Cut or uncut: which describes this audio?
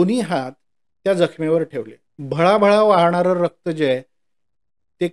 uncut